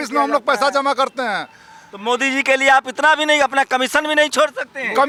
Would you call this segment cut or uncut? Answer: uncut